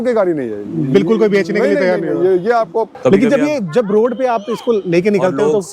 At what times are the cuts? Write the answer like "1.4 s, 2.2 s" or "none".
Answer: 2.9 s